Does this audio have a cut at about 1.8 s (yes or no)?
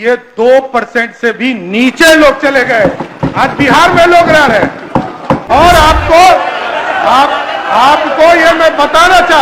no